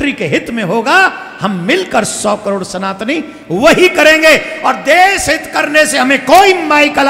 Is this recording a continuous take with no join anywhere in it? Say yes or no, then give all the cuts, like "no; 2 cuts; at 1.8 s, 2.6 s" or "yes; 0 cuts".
yes; 0 cuts